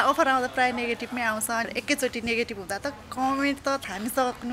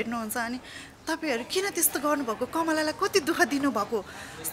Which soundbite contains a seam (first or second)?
first